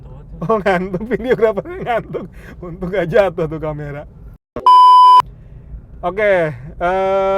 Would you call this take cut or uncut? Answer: uncut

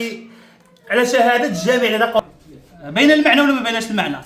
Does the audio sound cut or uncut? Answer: cut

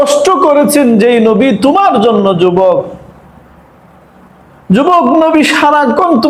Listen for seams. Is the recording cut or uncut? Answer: uncut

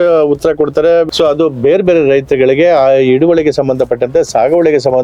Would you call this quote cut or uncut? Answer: cut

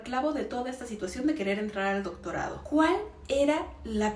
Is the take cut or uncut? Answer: uncut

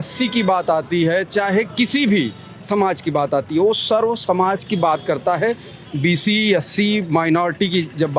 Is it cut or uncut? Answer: uncut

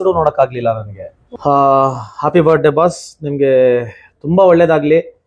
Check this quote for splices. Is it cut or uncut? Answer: cut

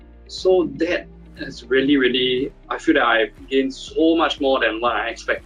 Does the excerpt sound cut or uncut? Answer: cut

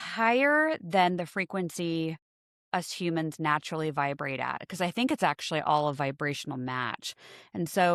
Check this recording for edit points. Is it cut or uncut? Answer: uncut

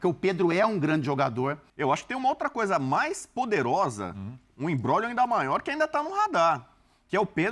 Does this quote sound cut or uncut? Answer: cut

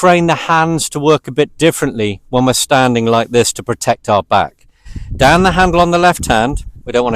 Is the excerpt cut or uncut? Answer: uncut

